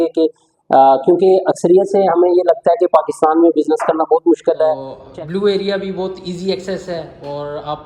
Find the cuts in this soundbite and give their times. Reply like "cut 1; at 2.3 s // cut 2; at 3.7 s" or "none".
cut 1; at 4.9 s